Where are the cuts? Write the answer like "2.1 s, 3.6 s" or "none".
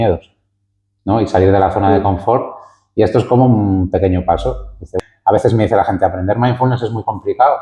4.9 s